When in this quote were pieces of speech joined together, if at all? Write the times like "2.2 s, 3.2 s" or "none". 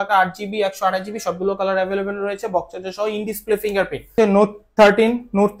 4.1 s